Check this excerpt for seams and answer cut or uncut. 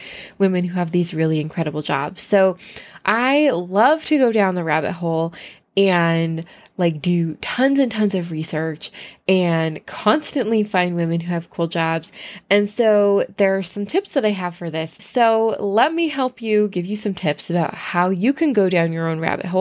cut